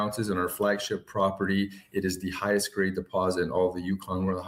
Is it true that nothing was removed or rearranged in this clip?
yes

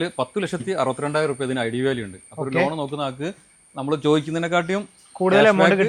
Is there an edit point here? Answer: no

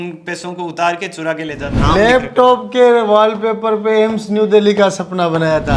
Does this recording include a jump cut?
yes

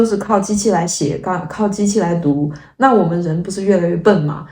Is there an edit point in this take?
no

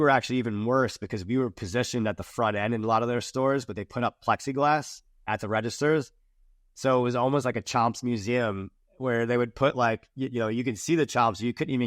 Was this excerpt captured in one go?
yes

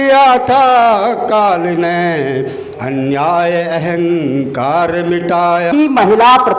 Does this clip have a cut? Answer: yes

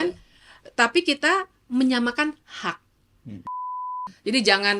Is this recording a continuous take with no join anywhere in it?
no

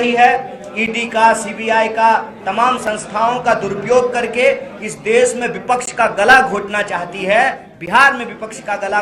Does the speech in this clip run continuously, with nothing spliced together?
yes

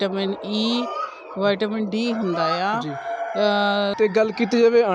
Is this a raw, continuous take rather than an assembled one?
no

